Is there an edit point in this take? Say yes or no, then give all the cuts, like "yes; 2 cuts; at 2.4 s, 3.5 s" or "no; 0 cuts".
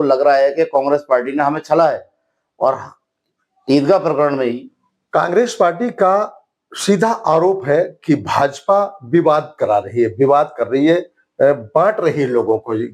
no; 0 cuts